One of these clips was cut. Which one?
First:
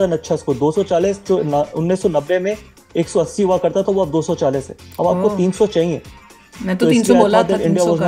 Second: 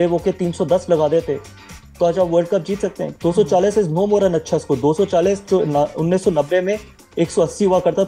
second; 1 cut; at 3.0 s

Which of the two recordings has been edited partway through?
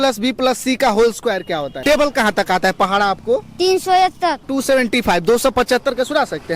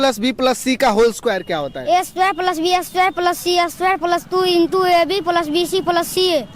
first; 2 cuts; at 1.8 s, 4.5 s

